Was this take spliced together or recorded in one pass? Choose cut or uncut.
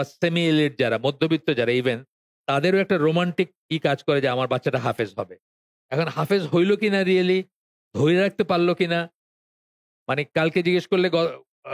uncut